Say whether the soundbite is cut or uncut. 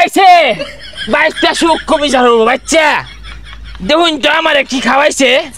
uncut